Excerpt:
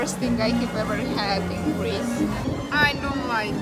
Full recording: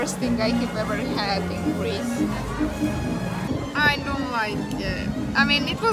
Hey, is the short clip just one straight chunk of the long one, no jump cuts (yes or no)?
no